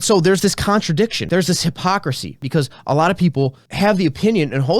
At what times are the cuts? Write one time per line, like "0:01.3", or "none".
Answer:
0:01.2
0:02.4
0:03.6